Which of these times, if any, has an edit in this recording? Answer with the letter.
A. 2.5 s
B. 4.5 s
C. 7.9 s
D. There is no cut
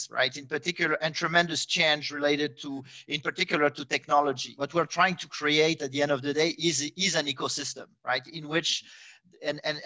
B